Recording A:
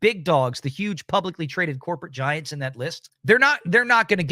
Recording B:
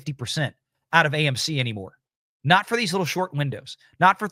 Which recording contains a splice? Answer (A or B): A